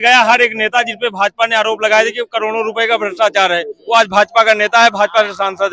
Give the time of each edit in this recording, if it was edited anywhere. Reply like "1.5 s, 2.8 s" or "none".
none